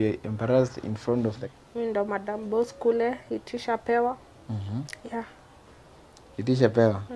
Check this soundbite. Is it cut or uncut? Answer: cut